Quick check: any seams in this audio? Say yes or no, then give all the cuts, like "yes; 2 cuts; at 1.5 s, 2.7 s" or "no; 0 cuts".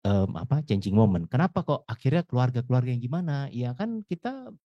no; 0 cuts